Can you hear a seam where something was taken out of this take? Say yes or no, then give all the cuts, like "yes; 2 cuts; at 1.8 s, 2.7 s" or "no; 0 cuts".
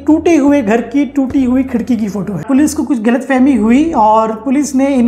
yes; 1 cut; at 2.4 s